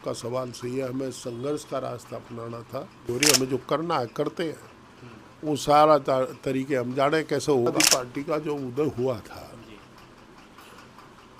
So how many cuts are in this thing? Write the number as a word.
two